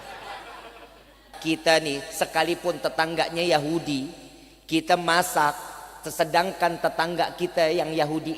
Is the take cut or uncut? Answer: cut